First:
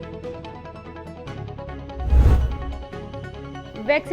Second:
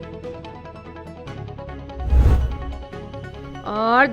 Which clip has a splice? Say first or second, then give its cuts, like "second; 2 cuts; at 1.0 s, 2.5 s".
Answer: second; 1 cut; at 3.2 s